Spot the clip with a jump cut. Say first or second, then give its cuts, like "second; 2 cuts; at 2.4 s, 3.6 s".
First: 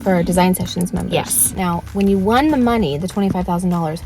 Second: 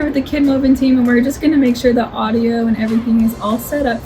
first; 1 cut; at 1.5 s